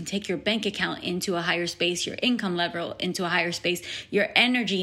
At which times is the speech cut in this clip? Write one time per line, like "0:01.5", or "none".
none